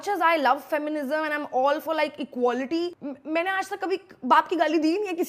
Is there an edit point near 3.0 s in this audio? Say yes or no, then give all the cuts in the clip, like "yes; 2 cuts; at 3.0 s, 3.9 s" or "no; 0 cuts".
yes; 1 cut; at 3.0 s